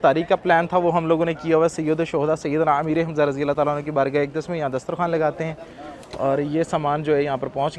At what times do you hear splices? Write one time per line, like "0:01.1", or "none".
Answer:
none